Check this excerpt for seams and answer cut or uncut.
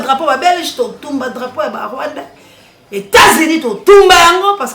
uncut